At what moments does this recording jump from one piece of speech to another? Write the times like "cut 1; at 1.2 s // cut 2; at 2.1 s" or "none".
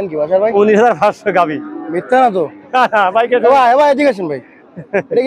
none